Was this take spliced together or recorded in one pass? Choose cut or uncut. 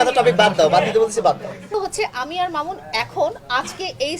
cut